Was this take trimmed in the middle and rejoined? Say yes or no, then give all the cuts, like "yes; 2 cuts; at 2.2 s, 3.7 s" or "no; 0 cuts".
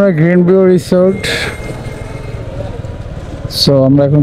no; 0 cuts